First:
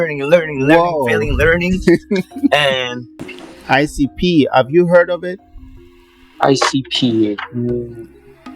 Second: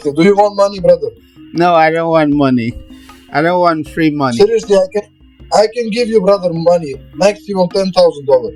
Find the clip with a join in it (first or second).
first